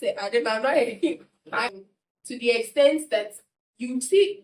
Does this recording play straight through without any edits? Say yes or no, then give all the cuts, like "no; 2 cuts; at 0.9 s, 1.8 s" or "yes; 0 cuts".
no; 1 cut; at 1.6 s